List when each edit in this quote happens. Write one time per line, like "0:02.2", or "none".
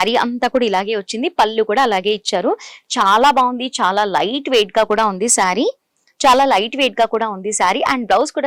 none